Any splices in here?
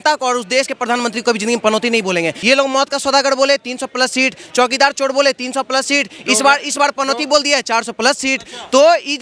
yes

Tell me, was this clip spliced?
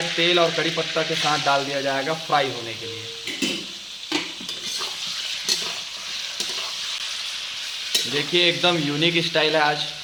no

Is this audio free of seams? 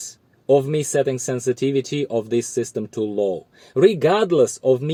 yes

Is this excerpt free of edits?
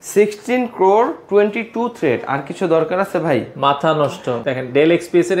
yes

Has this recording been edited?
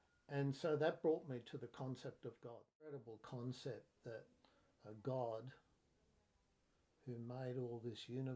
yes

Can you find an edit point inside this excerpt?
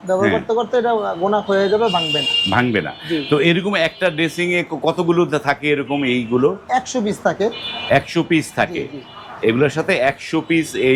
no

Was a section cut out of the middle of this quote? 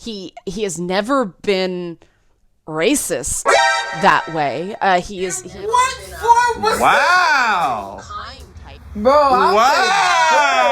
yes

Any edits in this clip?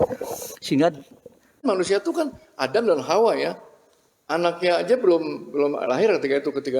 yes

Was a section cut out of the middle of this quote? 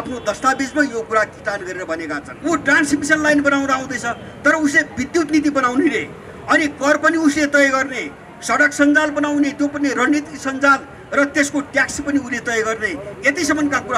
yes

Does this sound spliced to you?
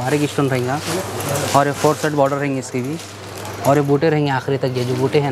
no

